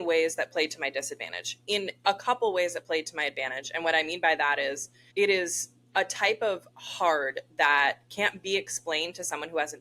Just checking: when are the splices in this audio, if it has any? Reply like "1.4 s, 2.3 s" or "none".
4.9 s